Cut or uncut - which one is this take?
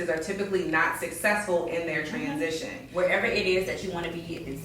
cut